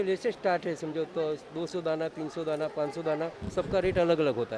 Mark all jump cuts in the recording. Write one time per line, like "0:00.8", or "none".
none